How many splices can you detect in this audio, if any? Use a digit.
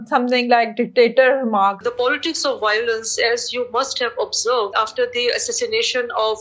2